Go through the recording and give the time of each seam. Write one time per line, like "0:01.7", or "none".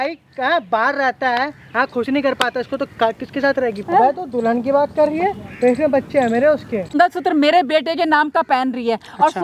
0:03.8
0:06.9